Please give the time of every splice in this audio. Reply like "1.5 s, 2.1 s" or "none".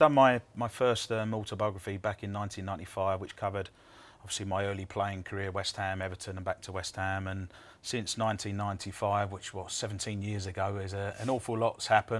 3.6 s